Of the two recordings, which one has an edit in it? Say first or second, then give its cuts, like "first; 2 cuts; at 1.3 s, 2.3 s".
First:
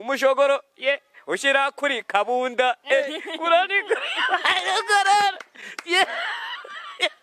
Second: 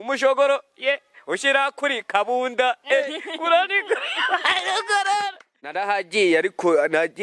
second; 1 cut; at 5.7 s